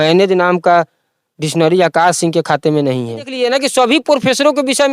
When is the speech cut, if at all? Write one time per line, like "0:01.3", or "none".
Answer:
0:03.3